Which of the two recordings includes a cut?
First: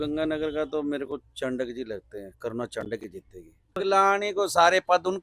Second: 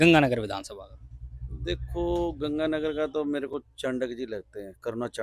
first; 1 cut; at 3.8 s

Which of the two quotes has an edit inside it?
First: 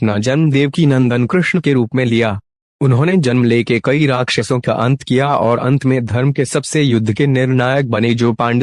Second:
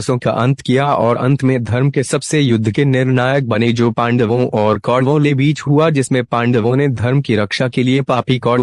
first; 1 cut; at 1.6 s

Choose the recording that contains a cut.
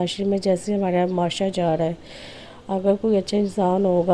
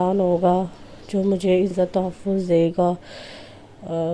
second; 1 cut; at 1.7 s

